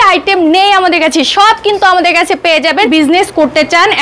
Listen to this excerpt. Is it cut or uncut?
cut